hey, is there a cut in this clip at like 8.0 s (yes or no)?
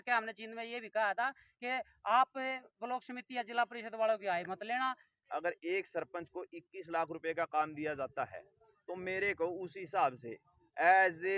no